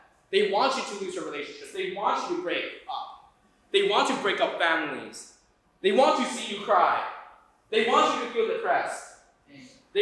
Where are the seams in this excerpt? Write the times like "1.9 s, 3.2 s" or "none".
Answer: none